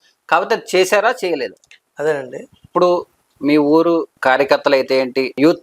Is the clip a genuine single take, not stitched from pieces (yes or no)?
no